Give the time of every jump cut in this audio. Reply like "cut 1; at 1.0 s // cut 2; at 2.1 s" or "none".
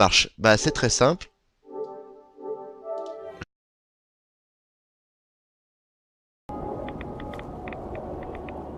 none